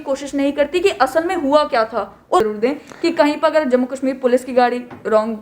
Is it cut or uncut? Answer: cut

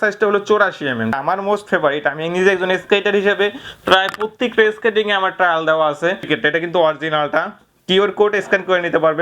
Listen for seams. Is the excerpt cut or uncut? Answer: cut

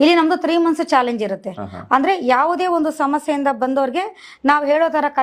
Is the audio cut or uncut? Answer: uncut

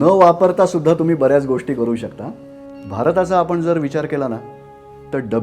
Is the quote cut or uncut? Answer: cut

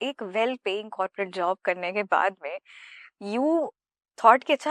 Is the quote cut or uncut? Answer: uncut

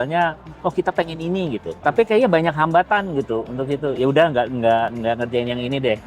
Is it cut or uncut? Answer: uncut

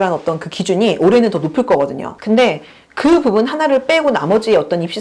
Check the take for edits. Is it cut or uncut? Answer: cut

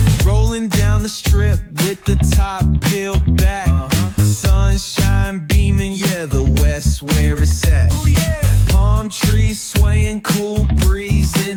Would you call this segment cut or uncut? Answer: uncut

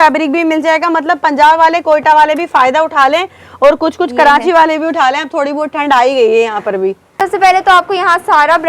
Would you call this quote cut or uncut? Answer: cut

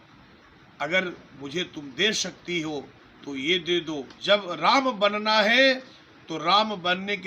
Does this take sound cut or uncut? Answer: cut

